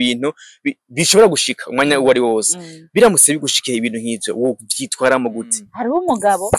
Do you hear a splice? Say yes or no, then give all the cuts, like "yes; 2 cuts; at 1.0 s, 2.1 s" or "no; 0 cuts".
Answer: yes; 1 cut; at 5.6 s